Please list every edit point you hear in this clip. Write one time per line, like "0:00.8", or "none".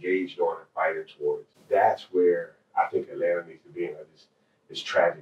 0:01.5